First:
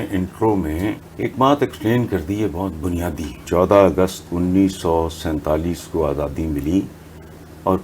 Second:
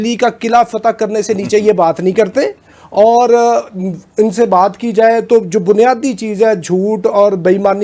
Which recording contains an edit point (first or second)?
first